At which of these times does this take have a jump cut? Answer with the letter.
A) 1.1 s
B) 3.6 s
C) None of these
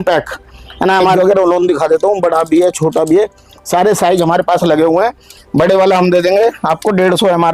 A